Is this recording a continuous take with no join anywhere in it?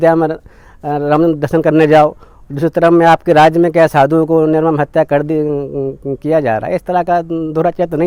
yes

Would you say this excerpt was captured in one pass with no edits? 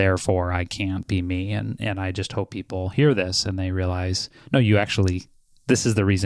no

